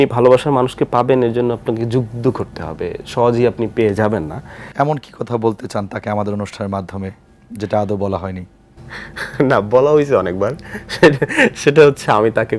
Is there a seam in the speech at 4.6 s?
yes; 1 cut; at 4.6 s

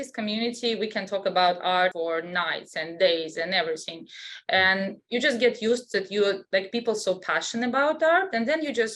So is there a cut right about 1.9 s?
yes; 1 cut; at 1.9 s

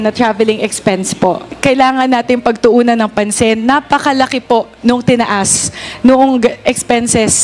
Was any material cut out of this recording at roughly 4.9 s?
no; 1 cut; at 1.5 s

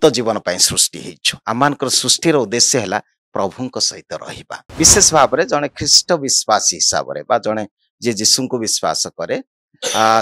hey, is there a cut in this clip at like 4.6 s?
yes; 1 cut; at 4.6 s

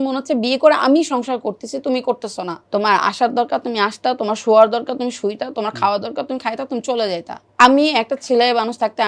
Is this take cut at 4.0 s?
no; 2 cuts; at 2.6 s, 7.4 s

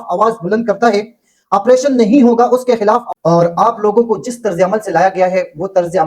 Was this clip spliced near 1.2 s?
no; 1 cut; at 3.1 s

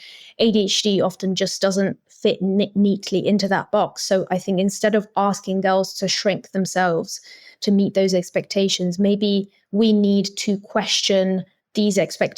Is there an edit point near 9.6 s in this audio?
yes; 1 cut; at 9.6 s

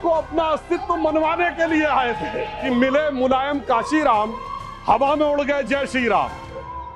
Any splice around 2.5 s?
yes; 1 cut; at 2.5 s

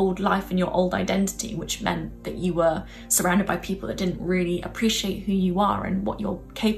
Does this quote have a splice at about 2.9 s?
no; 0 cuts

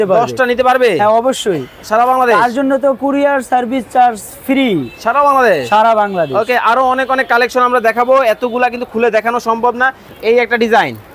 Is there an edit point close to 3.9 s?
no; 1 cut; at 10.0 s

